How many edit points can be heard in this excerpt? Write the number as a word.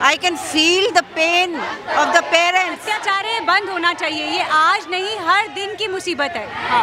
one